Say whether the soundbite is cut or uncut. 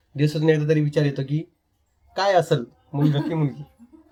uncut